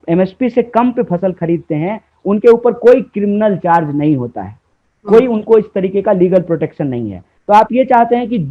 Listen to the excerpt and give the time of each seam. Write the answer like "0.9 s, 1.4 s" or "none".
none